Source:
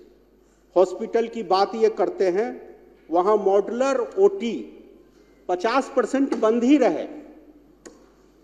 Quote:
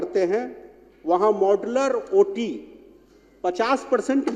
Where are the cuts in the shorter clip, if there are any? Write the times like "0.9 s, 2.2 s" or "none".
none